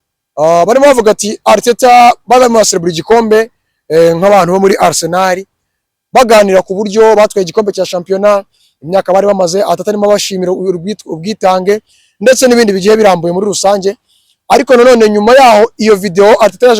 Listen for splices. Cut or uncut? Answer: uncut